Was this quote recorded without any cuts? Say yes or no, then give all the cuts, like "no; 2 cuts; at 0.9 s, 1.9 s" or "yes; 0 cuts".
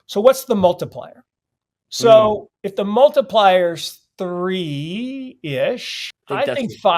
no; 1 cut; at 6.0 s